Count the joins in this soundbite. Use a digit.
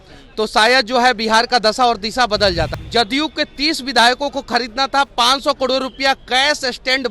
1